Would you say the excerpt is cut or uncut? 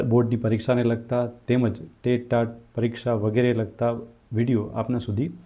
uncut